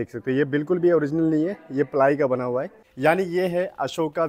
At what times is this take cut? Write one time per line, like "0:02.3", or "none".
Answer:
0:02.8